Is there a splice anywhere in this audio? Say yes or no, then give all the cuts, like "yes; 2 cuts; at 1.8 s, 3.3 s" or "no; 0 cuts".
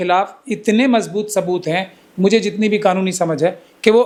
no; 0 cuts